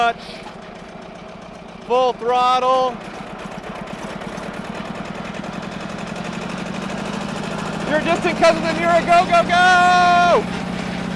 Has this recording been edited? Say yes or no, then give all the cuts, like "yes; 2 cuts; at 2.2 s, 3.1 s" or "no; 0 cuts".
no; 0 cuts